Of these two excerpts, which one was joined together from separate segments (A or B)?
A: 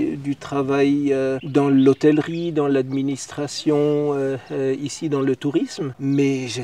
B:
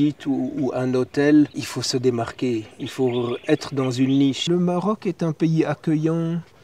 B